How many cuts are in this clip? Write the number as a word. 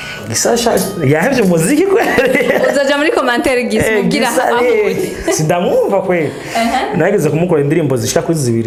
zero